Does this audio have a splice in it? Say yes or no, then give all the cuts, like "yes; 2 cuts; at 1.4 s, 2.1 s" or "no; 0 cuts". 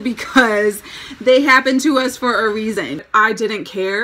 yes; 1 cut; at 2.9 s